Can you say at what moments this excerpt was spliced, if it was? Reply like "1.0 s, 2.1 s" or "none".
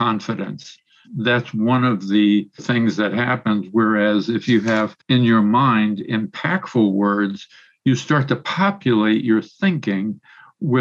1.0 s, 2.6 s, 5.0 s